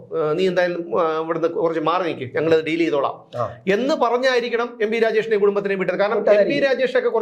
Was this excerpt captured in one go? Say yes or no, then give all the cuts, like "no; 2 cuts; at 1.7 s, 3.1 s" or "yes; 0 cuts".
yes; 0 cuts